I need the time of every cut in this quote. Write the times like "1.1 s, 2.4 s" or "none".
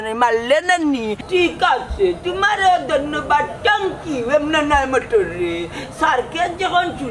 1.1 s